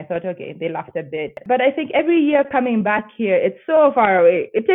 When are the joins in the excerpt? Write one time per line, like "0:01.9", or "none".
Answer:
0:01.4